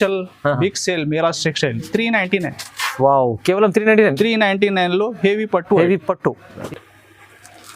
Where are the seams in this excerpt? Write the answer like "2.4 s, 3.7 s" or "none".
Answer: 6.6 s